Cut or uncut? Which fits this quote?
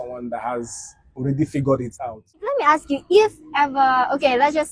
cut